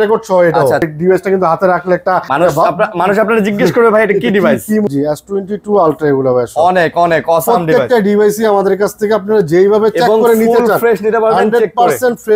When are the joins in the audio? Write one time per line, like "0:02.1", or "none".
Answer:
0:00.9
0:02.3
0:04.9